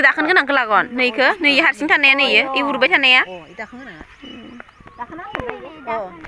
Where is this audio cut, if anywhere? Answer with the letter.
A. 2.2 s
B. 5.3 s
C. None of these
C